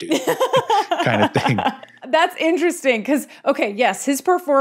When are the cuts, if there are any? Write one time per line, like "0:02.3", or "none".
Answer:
0:01.9